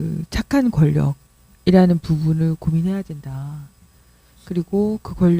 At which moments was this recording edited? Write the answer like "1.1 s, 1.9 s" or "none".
none

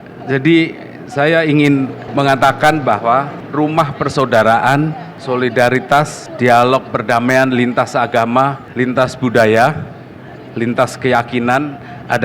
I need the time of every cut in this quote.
2.0 s, 3.4 s, 5.1 s, 6.2 s, 8.6 s

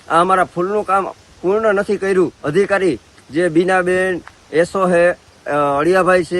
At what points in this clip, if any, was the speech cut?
2.4 s

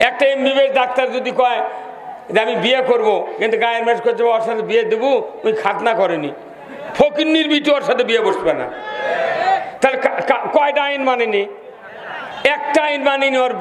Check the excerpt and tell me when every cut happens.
none

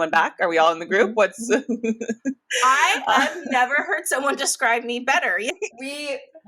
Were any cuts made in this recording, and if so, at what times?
5.5 s

